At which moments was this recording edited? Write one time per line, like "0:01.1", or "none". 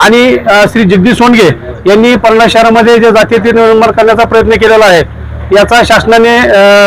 none

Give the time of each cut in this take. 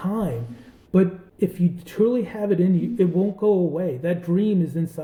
none

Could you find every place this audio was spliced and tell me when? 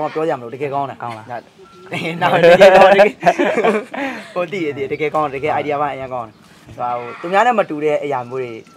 none

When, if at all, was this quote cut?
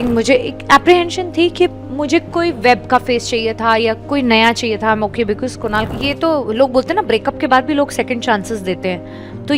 0:05.9

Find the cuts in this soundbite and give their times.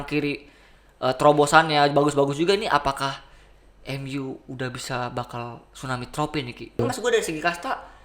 0:06.8

